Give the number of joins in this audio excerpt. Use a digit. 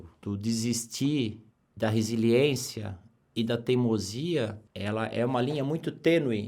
1